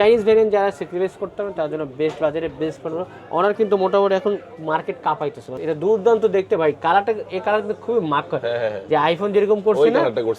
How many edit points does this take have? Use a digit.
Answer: 1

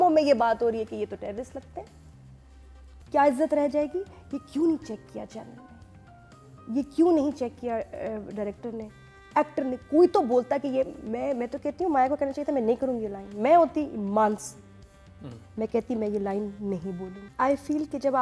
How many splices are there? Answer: 1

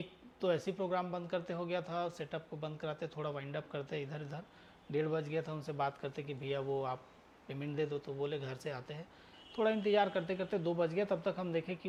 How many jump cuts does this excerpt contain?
0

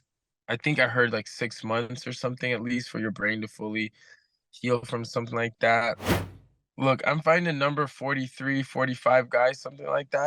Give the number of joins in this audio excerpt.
1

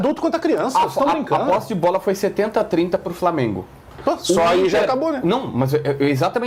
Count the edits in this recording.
0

